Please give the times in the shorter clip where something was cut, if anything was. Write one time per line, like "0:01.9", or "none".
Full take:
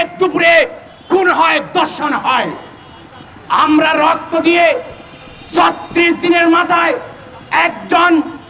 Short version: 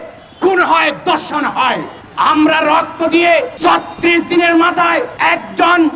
0:02.0
0:03.5
0:05.1